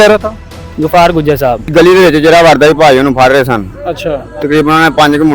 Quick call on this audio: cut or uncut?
cut